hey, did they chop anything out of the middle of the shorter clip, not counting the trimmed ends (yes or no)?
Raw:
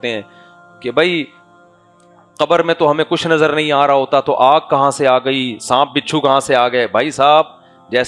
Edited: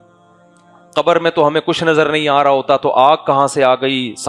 no